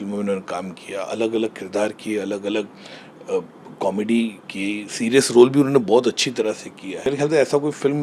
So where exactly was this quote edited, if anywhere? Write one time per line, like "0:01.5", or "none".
0:07.1

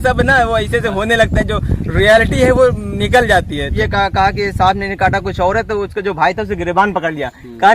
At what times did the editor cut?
0:03.7

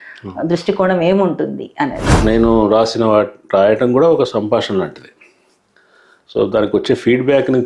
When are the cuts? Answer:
0:02.0

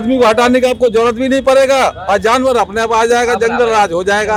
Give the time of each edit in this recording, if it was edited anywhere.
none

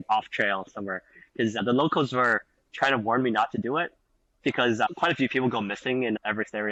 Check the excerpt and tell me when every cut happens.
none

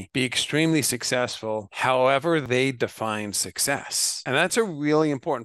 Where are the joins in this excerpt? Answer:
0:01.7
0:02.4
0:04.5

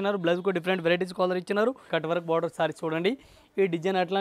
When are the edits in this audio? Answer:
0:01.9

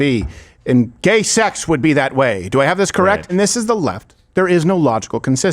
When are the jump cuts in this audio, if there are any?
0:03.3

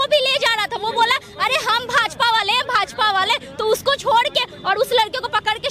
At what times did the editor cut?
none

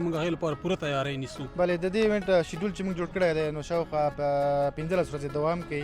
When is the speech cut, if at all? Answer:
0:01.4

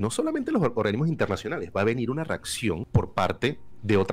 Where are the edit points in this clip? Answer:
0:02.8

